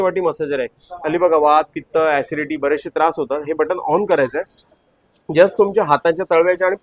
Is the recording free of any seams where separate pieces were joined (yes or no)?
yes